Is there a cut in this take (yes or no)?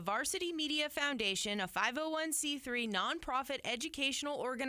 no